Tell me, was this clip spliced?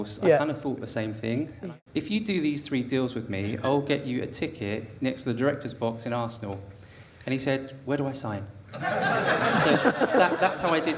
yes; 1 cut; at 1.6 s

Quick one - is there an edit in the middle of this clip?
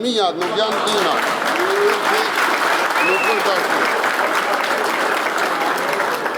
no; 0 cuts

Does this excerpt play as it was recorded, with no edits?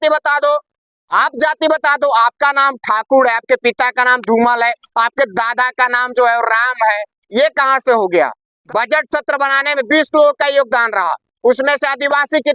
no; 1 cut; at 8.5 s

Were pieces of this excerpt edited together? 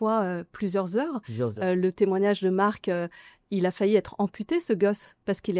no; 0 cuts

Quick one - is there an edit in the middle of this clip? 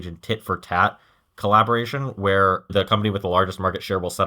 yes; 1 cut; at 2.7 s

